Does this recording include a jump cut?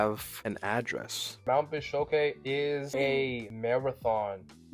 yes; 2 cuts; at 1.4 s, 3.2 s

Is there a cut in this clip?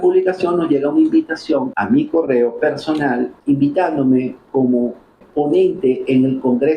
yes; 3 cuts; at 1.7 s, 3.3 s, 5.2 s

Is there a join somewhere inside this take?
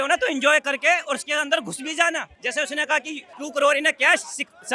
yes; 2 cuts; at 2.4 s, 3.2 s

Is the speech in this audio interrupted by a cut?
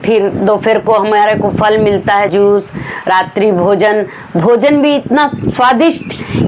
yes; 1 cut; at 2.3 s

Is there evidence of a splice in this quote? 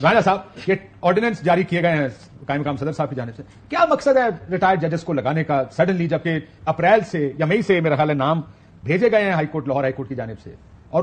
no; 0 cuts

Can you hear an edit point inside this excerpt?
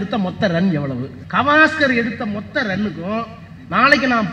yes; 1 cut; at 1.2 s

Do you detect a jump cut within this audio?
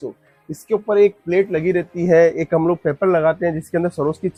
no; 0 cuts

